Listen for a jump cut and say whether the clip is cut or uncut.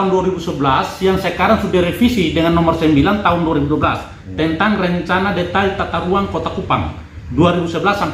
uncut